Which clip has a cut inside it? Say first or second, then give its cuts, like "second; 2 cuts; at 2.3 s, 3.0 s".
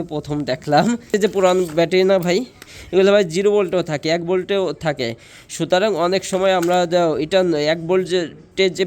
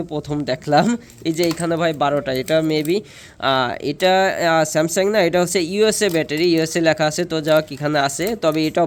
first; 1 cut; at 1.1 s